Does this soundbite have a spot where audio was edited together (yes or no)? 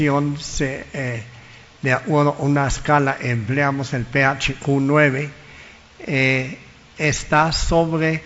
no